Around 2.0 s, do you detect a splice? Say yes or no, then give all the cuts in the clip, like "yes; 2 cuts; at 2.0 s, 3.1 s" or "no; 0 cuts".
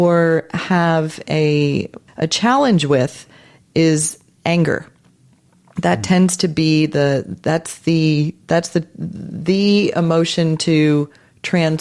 yes; 1 cut; at 2.0 s